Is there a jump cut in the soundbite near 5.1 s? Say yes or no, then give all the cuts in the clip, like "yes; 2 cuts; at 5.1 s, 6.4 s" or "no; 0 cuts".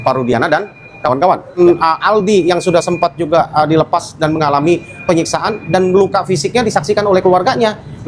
no; 1 cut; at 1.6 s